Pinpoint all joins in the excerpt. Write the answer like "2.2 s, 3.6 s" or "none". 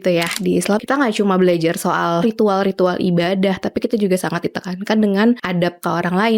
0.8 s, 2.2 s, 5.5 s